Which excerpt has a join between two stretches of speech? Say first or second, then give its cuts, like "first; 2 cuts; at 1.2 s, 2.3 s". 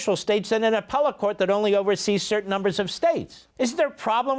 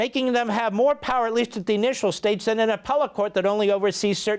first; 1 cut; at 3.4 s